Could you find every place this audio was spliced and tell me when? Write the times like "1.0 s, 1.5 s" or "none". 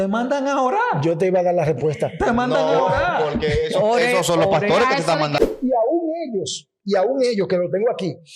5.4 s